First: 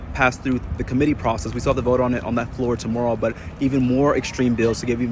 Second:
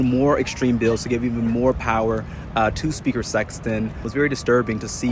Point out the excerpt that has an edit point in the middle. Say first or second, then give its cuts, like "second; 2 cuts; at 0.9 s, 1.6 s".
second; 1 cut; at 4.1 s